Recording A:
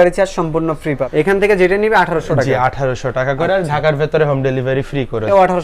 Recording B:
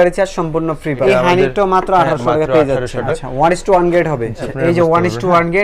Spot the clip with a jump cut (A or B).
B